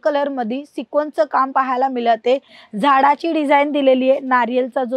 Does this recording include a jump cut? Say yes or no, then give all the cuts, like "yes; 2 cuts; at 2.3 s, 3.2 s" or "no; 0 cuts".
yes; 1 cut; at 2.5 s